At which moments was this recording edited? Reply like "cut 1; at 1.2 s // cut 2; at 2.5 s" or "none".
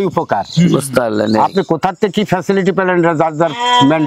none